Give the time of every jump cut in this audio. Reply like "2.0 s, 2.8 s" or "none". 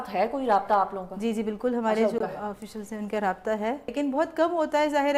3.9 s